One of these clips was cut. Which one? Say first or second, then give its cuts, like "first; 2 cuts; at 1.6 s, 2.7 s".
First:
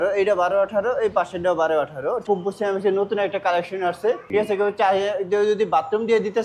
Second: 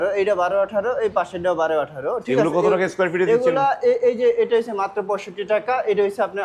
first; 2 cuts; at 2.2 s, 4.2 s